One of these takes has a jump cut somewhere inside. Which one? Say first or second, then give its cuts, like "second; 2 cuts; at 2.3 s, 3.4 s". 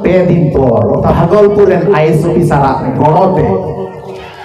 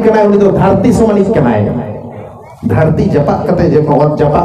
first; 2 cuts; at 1.1 s, 2.9 s